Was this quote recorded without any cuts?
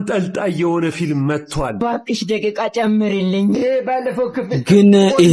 yes; 0 cuts

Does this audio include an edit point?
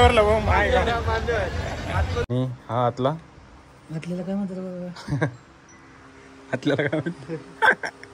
yes; 1 cut; at 2.3 s

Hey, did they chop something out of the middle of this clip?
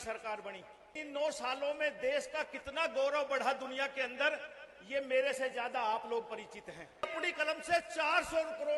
yes; 2 cuts; at 1.0 s, 7.1 s

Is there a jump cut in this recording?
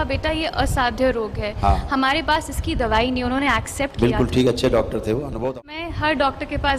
yes; 1 cut; at 5.5 s

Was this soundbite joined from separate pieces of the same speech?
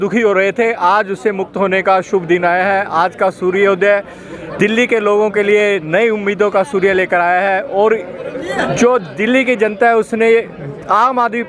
no; 0 cuts

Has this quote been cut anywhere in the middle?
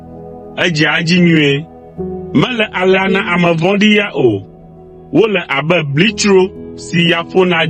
no; 0 cuts

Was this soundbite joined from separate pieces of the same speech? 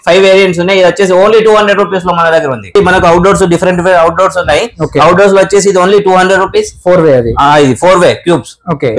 yes; 1 cut; at 2.8 s

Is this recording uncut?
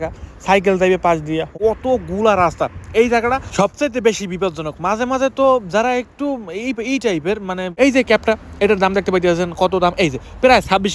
no; 2 cuts; at 1.5 s, 7.7 s

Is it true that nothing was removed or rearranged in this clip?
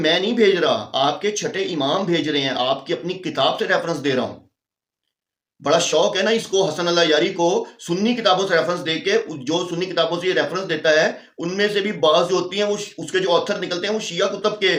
yes; 0 cuts

